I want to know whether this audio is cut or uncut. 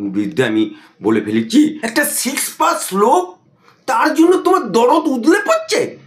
cut